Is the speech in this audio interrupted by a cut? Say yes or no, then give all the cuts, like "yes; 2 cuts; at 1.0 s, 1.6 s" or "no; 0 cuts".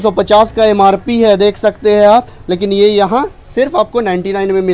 no; 0 cuts